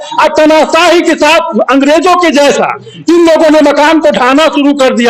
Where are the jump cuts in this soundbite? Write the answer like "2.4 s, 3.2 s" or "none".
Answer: none